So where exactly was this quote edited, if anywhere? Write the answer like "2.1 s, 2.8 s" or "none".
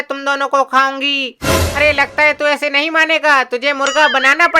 1.3 s